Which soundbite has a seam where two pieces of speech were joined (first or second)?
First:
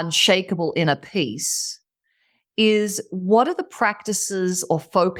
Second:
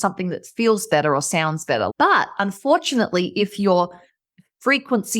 second